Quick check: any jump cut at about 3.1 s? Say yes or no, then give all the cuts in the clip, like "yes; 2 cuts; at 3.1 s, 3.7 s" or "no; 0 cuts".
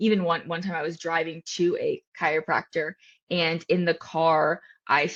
no; 0 cuts